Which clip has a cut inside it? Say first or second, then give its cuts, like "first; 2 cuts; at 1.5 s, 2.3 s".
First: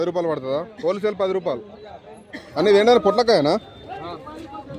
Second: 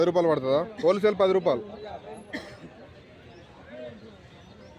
first; 1 cut; at 2.4 s